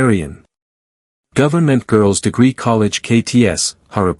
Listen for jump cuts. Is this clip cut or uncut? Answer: uncut